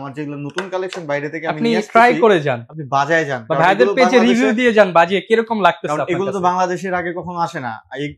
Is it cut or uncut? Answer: uncut